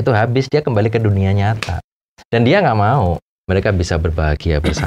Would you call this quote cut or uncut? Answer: cut